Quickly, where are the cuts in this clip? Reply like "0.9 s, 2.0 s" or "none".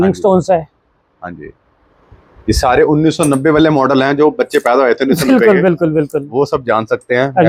none